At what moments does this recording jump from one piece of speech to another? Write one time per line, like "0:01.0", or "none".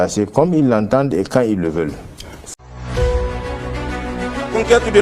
0:02.6